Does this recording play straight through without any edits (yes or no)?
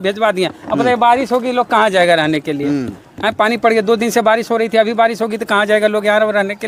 yes